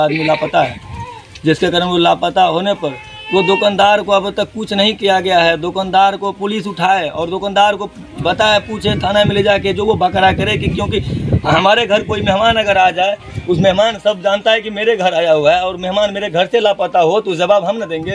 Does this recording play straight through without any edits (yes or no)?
yes